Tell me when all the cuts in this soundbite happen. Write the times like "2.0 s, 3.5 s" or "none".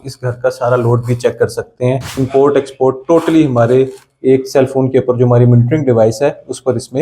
2.1 s

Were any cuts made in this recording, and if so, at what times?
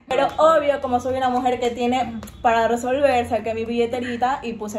none

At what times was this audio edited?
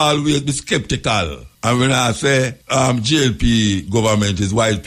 1.4 s, 2.6 s

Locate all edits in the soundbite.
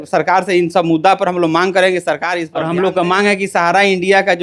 2.5 s

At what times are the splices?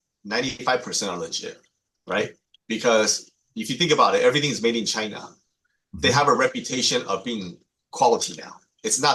none

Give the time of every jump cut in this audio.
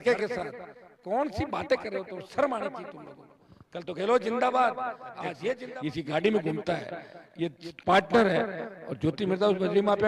5.6 s

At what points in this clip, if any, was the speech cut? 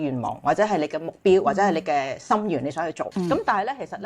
3.0 s

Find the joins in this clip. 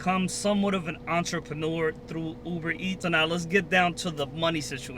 3.0 s

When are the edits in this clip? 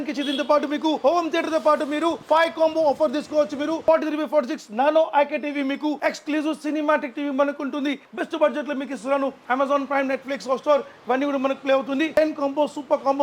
2.2 s, 3.8 s, 6.0 s, 8.1 s, 9.5 s, 12.1 s

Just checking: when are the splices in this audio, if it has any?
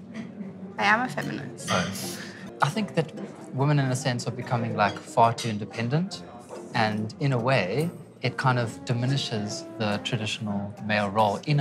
2.4 s

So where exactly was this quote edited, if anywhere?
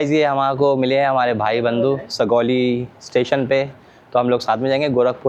none

